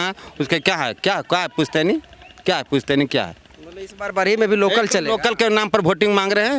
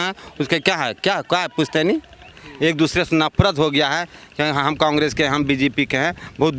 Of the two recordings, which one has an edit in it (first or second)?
second